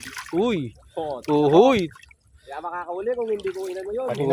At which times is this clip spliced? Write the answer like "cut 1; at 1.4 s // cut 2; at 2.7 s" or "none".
none